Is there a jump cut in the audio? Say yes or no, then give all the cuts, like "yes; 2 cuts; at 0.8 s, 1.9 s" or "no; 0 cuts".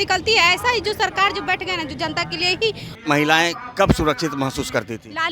yes; 1 cut; at 2.9 s